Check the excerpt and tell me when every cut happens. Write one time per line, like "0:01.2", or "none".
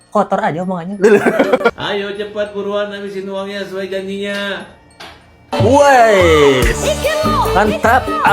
0:01.7

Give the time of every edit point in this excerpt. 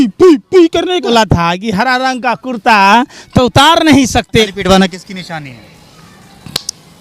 0:01.1
0:04.5

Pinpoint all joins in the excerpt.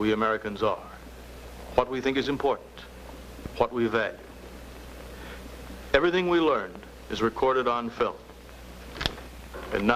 0:02.6

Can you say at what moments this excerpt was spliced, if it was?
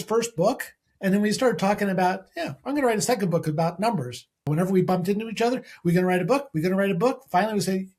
0:04.4

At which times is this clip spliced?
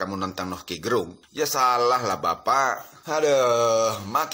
0:01.2
0:02.9

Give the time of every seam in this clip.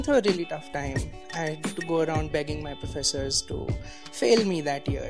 none

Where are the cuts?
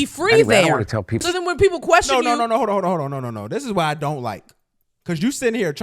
0:01.2

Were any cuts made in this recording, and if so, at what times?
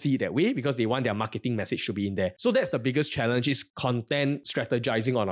0:02.4
0:03.7

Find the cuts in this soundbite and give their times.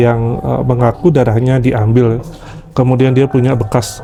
none

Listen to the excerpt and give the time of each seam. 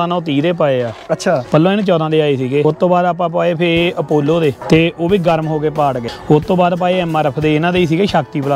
0:01.4
0:02.6
0:04.6
0:06.1

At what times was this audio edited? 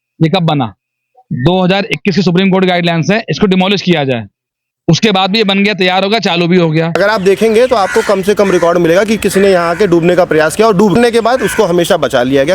0:06.9
0:10.9

